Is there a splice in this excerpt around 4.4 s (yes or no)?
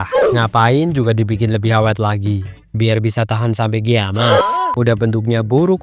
yes